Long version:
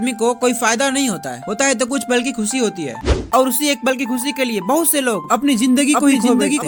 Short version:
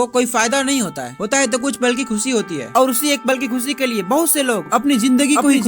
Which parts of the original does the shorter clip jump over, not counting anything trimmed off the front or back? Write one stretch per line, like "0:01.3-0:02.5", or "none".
0:02.9-0:03.2